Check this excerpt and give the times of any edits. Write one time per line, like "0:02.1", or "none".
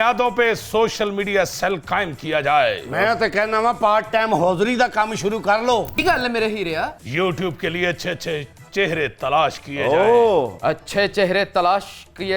0:06.0
0:07.0
0:10.5